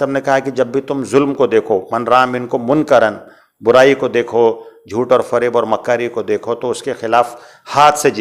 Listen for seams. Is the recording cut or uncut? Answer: uncut